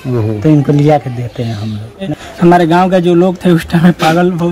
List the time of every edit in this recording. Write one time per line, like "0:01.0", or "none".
0:02.1